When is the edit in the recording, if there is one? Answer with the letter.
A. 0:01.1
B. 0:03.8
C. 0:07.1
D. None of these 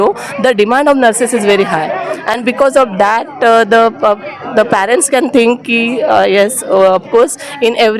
D